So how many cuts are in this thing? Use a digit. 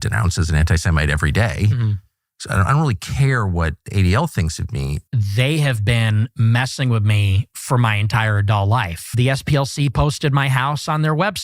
2